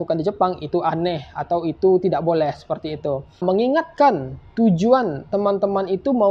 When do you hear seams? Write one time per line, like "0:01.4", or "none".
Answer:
0:03.4